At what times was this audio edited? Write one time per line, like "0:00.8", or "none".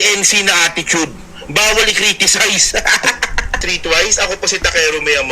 0:03.7